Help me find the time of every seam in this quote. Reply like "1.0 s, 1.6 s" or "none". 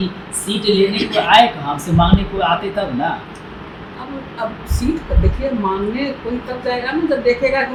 none